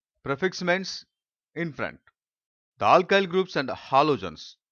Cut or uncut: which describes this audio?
uncut